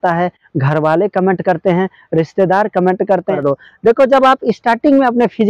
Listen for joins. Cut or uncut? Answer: cut